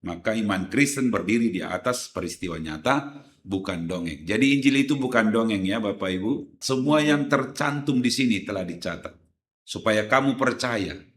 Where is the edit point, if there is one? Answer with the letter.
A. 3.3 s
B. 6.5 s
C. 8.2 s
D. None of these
B